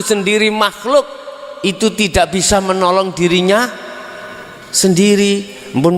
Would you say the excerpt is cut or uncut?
uncut